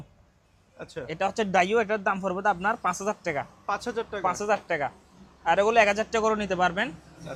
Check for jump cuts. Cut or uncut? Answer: uncut